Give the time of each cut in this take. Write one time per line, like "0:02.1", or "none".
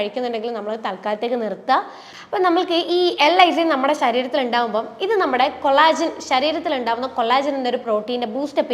0:02.0